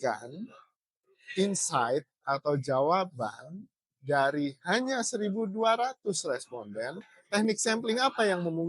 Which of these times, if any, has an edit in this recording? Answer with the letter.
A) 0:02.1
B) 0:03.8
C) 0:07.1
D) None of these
C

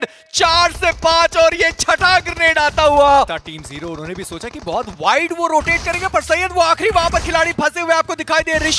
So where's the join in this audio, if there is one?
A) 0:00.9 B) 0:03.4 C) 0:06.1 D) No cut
B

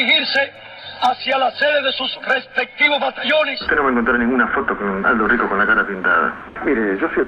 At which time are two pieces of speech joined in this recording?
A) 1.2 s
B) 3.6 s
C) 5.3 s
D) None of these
B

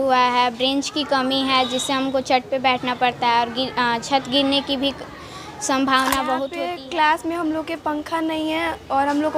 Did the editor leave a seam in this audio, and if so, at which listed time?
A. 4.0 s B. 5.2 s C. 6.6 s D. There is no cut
C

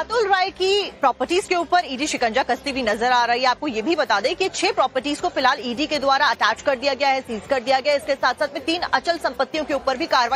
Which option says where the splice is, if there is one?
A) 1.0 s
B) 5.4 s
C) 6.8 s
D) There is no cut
B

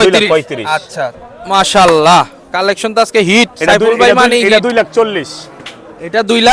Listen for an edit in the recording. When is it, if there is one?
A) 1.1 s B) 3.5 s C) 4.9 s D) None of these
A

